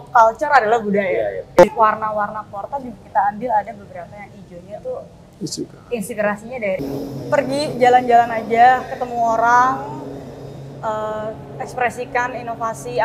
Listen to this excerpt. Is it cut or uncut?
cut